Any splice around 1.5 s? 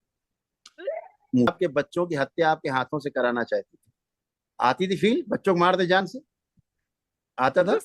yes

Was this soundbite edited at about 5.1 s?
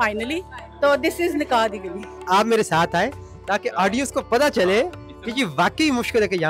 no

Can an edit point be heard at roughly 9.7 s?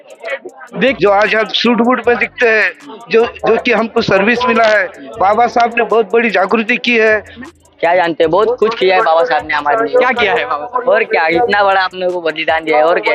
no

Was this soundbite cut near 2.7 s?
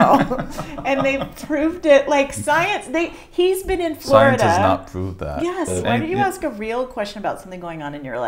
no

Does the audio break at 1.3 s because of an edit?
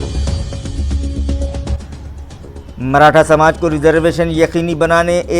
yes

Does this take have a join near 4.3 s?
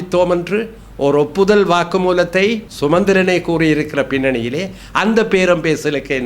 no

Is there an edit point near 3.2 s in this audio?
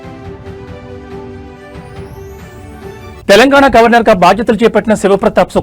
yes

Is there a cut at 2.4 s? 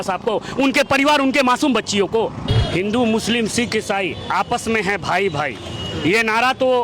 yes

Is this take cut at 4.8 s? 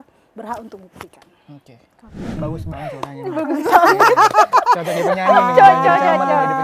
no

